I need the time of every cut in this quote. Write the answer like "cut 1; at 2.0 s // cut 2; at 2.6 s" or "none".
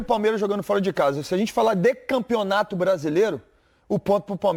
none